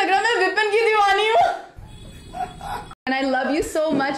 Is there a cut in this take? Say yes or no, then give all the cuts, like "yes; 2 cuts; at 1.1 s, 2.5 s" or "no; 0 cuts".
yes; 1 cut; at 2.9 s